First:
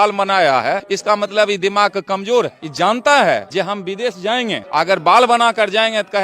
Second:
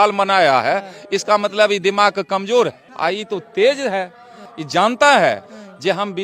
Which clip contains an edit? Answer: first; 4 cuts; at 0.9 s, 2.6 s, 3.5 s, 4.6 s

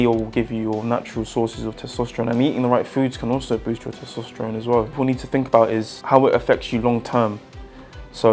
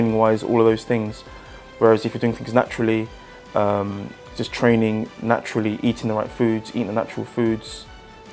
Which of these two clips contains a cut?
first; 2 cuts; at 4.9 s, 5.9 s

